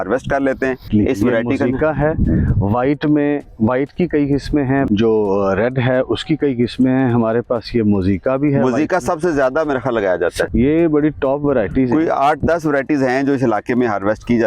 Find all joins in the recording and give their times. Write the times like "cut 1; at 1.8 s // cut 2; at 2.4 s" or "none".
cut 1; at 0.9 s // cut 2; at 4.9 s // cut 3; at 10.5 s

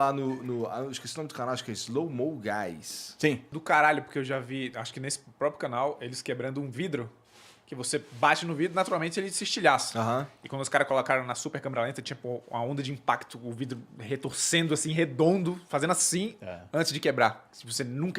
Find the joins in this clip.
cut 1; at 3.5 s

